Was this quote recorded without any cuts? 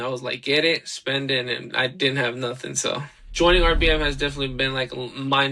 no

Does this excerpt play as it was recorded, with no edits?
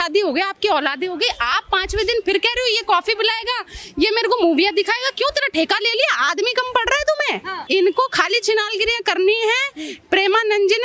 no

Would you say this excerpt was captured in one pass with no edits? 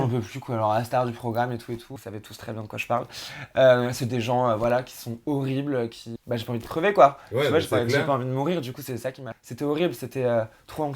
no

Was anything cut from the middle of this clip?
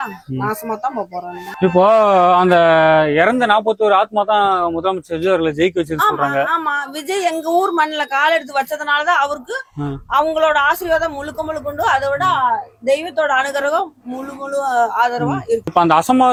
no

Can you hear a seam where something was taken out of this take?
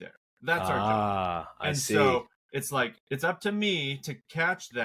no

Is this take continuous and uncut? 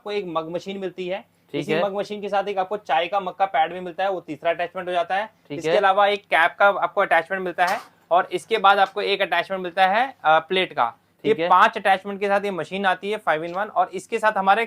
yes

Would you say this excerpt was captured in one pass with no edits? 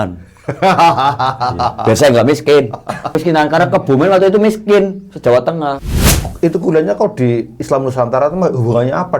no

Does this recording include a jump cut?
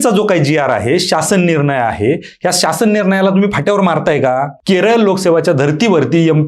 yes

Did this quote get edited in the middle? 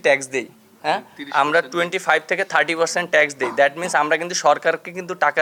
no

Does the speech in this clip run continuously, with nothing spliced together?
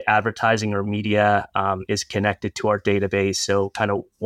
yes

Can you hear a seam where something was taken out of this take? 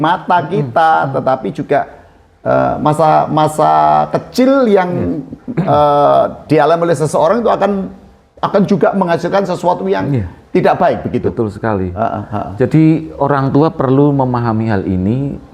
no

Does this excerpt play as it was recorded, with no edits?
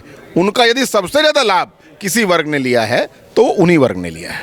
yes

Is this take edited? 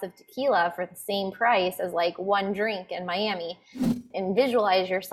yes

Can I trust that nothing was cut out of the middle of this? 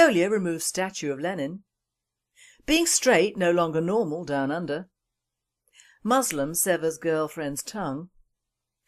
no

